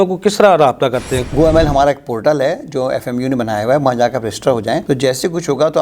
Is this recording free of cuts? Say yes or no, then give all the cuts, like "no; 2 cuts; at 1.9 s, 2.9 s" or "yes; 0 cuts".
no; 2 cuts; at 1.2 s, 4.8 s